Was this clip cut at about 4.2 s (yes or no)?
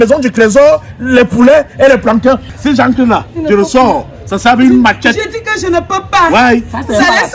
no